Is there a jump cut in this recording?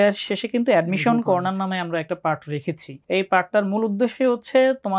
yes; 1 cut; at 2.9 s

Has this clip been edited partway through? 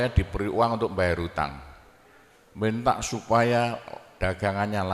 no; 0 cuts

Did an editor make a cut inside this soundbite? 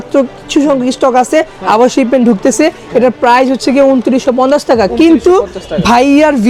no; 0 cuts

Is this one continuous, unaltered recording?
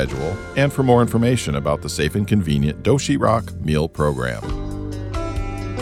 no; 1 cut; at 4.4 s

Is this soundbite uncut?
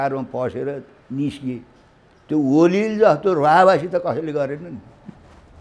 yes; 0 cuts

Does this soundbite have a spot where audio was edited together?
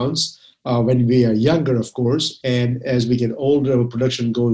no; 0 cuts

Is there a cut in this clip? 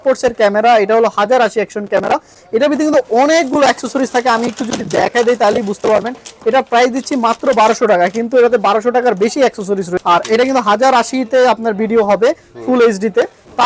no; 0 cuts

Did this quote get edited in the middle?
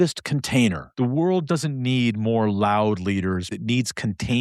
yes; 2 cuts; at 0.8 s, 3.5 s

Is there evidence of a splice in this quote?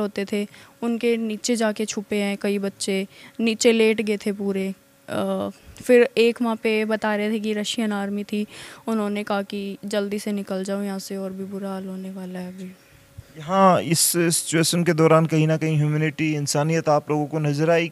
no; 0 cuts

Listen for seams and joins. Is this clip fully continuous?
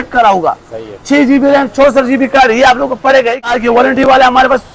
no; 1 cut; at 3.5 s

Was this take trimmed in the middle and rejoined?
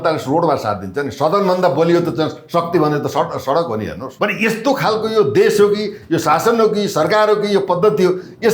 yes; 1 cut; at 4.0 s

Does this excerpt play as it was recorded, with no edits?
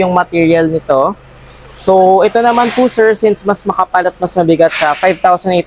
yes; 0 cuts

